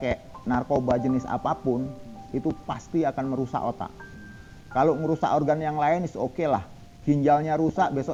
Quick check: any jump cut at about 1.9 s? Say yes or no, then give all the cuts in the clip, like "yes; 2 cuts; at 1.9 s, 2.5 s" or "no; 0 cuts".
no; 0 cuts